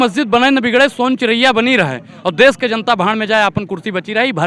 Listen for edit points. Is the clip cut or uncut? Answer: uncut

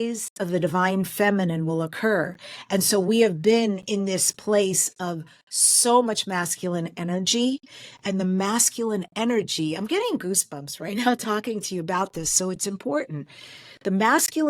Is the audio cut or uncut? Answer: uncut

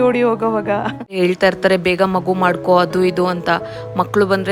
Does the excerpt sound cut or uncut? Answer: cut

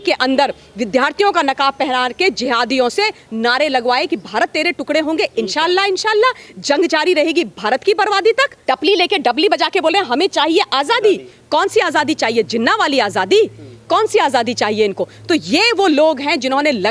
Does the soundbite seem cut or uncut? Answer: uncut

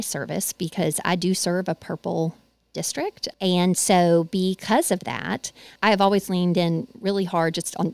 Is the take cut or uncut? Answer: cut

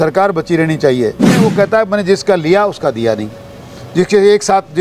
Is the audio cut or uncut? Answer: cut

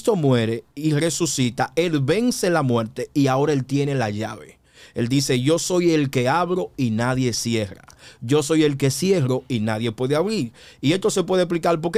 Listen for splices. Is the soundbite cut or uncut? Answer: uncut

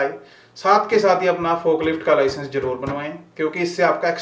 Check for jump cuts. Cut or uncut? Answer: uncut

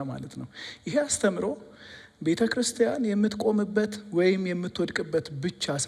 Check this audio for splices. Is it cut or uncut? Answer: uncut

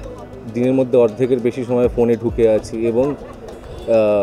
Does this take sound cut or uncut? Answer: uncut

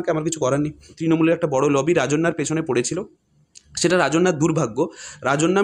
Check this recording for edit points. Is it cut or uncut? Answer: cut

